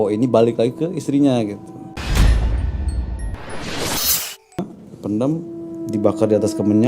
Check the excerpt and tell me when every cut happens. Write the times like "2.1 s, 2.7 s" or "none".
1.7 s, 4.7 s